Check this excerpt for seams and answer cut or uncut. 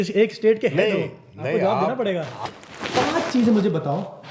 cut